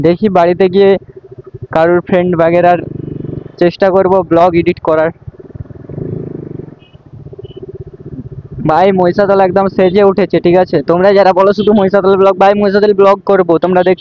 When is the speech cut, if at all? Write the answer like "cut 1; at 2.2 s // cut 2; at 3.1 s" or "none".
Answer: none